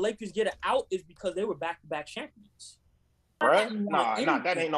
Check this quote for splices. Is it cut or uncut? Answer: cut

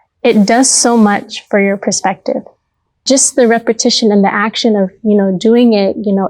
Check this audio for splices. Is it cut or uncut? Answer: cut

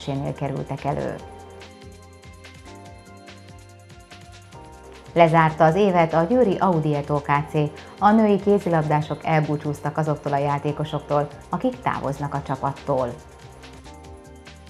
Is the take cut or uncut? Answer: cut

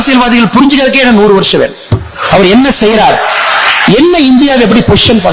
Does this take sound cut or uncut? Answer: uncut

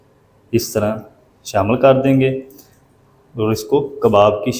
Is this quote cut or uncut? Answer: uncut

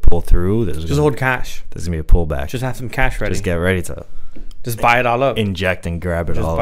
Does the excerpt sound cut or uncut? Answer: uncut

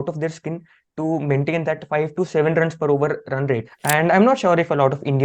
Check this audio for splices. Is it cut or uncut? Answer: cut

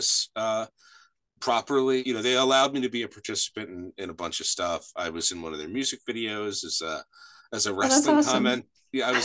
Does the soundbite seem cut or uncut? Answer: cut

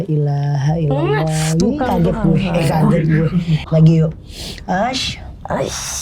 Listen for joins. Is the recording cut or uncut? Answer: cut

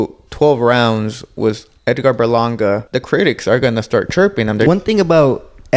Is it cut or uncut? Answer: cut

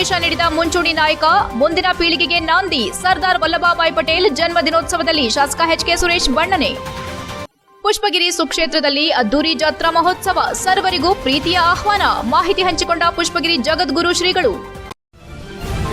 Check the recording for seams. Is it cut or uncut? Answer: cut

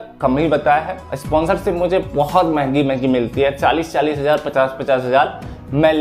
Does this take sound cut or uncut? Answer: cut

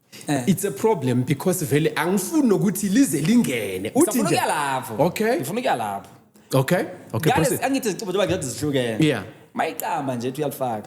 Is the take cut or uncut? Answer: uncut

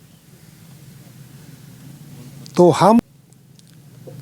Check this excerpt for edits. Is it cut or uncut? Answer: cut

